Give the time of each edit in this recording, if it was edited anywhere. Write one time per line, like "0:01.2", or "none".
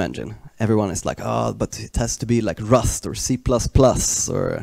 none